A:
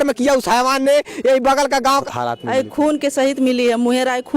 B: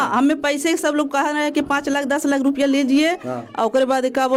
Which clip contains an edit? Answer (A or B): A